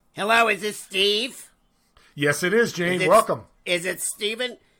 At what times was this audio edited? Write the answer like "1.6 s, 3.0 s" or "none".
none